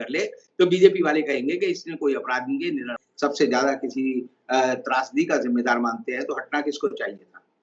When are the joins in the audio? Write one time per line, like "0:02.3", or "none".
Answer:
0:03.0